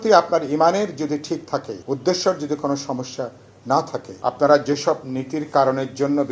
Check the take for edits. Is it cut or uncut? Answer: cut